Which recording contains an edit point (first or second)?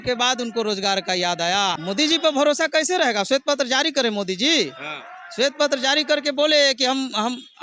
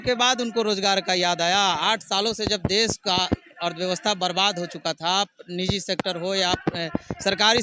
first